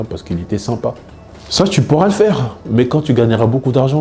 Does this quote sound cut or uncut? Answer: uncut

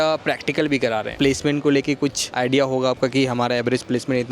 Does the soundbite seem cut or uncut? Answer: cut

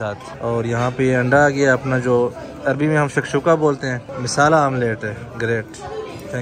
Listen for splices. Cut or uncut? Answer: uncut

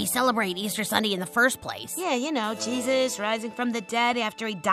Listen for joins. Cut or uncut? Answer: uncut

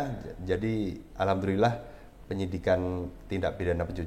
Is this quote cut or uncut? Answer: uncut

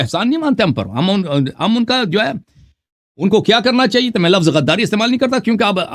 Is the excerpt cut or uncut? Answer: uncut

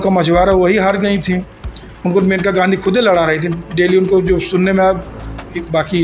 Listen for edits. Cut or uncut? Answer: uncut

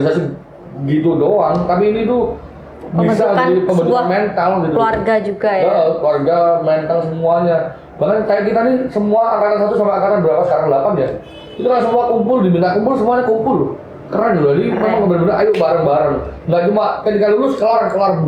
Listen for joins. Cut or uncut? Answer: uncut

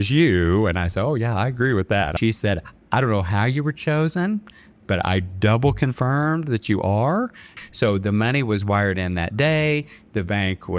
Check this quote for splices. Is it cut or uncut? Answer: cut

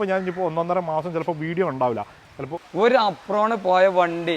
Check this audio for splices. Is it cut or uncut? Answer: cut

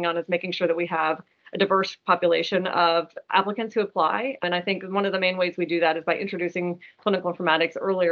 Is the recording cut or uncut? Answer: uncut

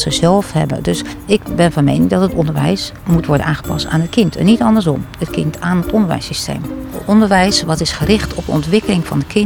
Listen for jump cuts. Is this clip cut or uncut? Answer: cut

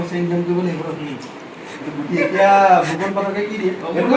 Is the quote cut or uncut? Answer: uncut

